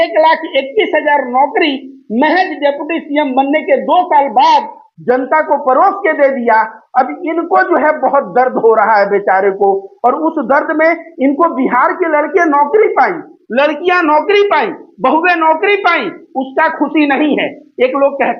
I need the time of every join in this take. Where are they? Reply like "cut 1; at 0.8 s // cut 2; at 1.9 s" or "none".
none